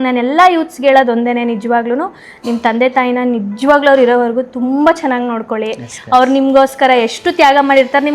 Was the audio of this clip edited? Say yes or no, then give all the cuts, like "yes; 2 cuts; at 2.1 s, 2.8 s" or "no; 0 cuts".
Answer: no; 0 cuts